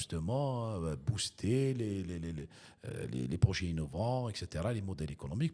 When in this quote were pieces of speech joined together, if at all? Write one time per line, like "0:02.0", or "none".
none